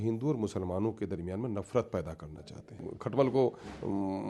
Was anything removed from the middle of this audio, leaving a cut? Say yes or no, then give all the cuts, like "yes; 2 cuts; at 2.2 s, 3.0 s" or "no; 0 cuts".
yes; 1 cut; at 2.9 s